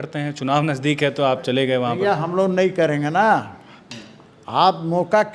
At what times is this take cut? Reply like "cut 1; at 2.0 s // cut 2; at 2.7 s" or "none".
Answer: none